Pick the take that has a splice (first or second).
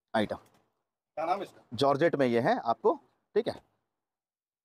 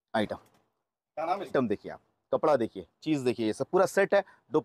second